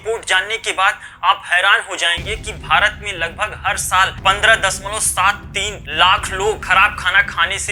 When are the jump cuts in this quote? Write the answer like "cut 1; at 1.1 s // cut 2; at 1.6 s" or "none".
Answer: none